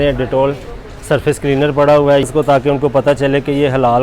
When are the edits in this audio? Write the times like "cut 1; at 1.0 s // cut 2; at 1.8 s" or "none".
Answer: cut 1; at 2.3 s